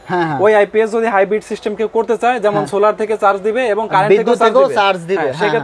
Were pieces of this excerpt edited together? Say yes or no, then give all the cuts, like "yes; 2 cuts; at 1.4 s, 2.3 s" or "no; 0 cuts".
no; 0 cuts